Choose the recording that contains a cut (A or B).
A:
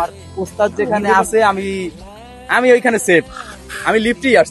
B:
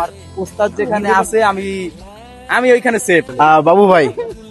B